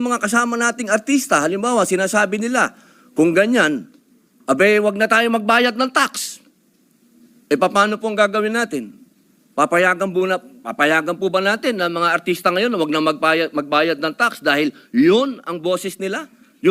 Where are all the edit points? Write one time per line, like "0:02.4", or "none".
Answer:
none

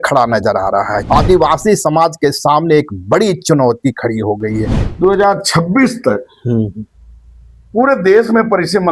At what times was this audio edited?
0:01.0
0:04.8

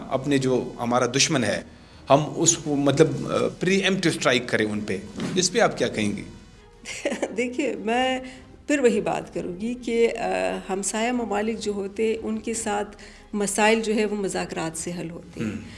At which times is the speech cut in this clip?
none

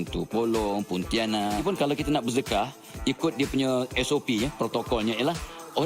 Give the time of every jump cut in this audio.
0:01.6

